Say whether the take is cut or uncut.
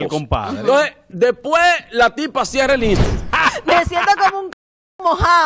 cut